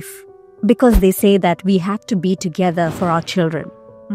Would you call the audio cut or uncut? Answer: uncut